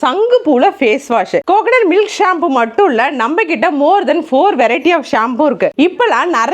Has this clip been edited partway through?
yes; 2 cuts; at 1.4 s, 5.7 s

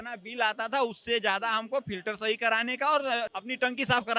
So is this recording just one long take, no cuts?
yes; 0 cuts

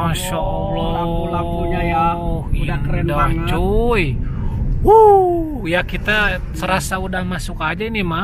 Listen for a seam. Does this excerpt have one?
no; 0 cuts

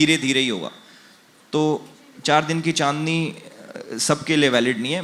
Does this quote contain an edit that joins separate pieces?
no; 0 cuts

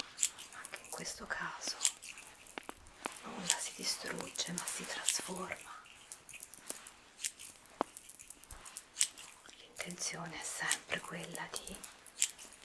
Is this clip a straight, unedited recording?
yes; 0 cuts

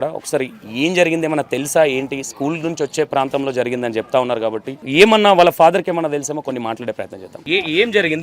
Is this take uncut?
no; 2 cuts; at 4.8 s, 7.3 s

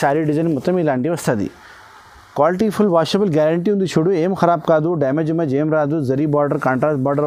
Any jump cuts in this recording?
no; 0 cuts

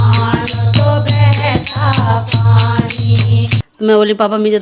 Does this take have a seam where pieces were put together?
yes; 1 cut; at 3.6 s

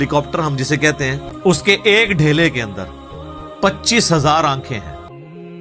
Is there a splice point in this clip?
yes; 1 cut; at 1.3 s

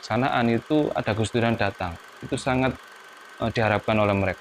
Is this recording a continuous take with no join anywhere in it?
yes; 0 cuts

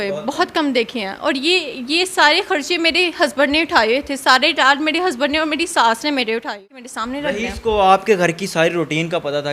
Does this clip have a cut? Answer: yes; 1 cut; at 6.7 s

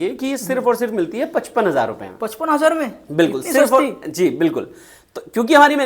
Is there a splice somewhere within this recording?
no; 0 cuts

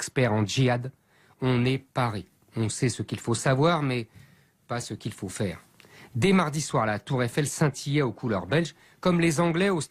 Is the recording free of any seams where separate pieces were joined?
no; 1 cut; at 5.9 s

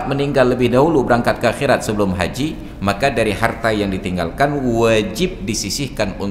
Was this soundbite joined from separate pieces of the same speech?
no; 0 cuts

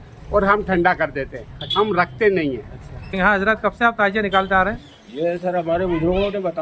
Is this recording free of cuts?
no; 1 cut; at 3.1 s

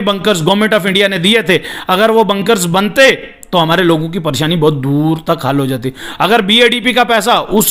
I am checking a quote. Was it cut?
no; 0 cuts

